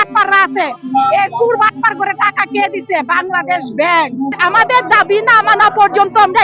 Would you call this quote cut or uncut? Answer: cut